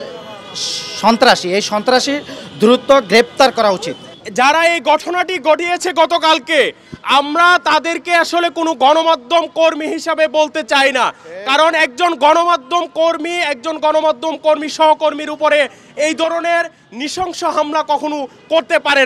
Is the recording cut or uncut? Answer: uncut